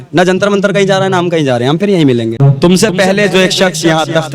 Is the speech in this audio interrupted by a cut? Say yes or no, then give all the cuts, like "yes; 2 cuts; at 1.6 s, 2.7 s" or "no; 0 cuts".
yes; 1 cut; at 2.4 s